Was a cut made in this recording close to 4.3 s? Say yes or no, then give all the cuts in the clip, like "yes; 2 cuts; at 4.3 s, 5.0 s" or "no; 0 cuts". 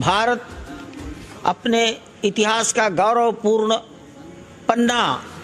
no; 1 cut; at 2.7 s